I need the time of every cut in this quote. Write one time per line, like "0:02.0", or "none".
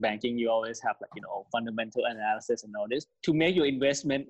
none

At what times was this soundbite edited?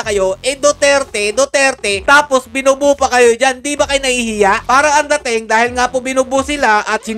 0:04.6

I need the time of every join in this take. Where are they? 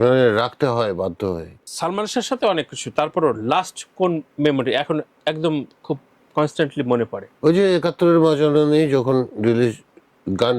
0:01.6
0:06.1

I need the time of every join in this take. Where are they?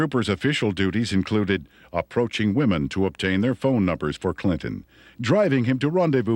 0:04.9

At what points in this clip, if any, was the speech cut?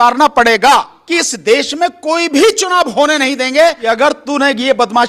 0:00.9
0:03.8

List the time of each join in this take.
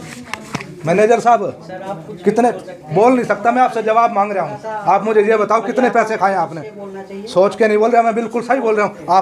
none

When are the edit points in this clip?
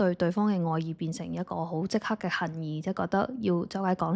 none

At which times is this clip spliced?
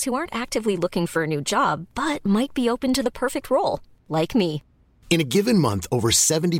none

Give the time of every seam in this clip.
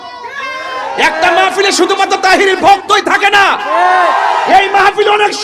none

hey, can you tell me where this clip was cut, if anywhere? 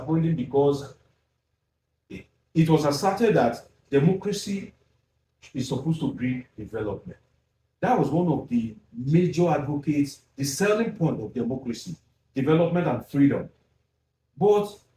none

